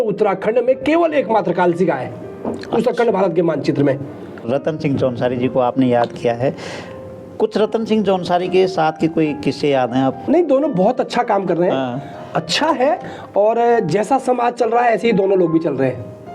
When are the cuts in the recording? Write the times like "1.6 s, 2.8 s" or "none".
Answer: 4.5 s, 10.2 s